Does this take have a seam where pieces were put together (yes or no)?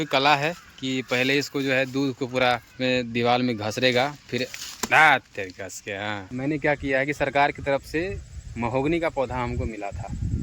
yes